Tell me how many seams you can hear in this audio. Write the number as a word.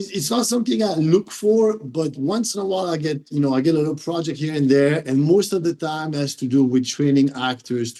zero